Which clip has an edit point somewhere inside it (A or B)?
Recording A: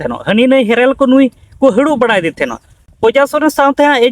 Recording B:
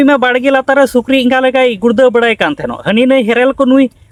A